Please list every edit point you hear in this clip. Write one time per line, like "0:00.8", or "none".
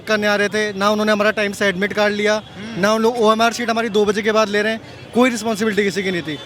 none